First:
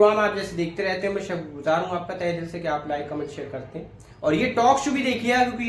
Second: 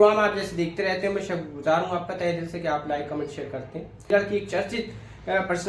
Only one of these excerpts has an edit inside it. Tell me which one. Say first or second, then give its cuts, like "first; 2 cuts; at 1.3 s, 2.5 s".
second; 1 cut; at 4.1 s